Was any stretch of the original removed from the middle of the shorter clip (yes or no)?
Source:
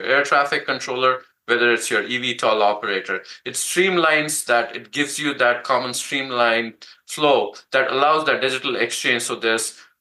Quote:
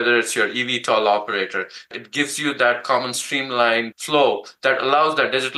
yes